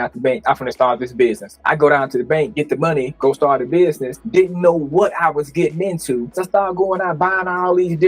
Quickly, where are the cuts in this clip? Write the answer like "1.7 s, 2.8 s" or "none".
1.5 s, 6.4 s